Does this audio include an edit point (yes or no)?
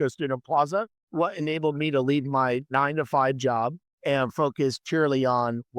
yes